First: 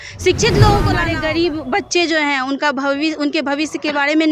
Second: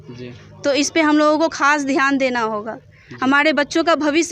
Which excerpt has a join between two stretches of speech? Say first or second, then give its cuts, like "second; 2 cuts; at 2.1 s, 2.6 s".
first; 1 cut; at 1.0 s